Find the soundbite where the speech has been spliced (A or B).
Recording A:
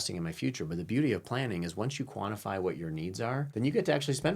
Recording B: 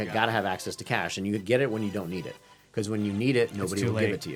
A